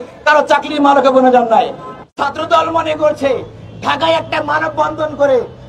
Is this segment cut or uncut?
cut